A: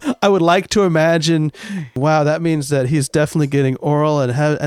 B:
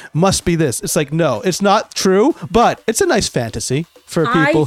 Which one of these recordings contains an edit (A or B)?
A